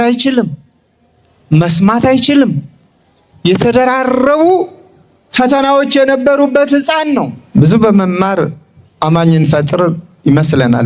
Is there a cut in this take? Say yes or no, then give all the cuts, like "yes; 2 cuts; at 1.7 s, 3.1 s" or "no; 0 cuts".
yes; 1 cut; at 7.4 s